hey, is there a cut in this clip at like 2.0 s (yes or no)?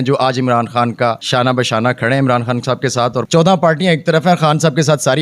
no